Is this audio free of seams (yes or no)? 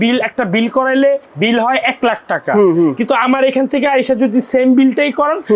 yes